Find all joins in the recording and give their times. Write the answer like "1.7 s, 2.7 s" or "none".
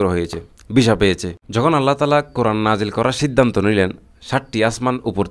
none